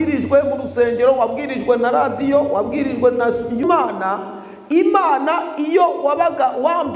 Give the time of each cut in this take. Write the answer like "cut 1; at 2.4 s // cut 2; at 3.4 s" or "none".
cut 1; at 3.6 s